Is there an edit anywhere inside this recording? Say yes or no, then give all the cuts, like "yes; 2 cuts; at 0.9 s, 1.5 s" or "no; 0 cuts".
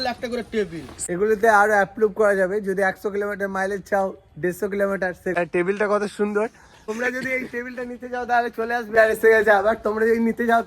yes; 4 cuts; at 1.0 s, 5.3 s, 6.9 s, 8.9 s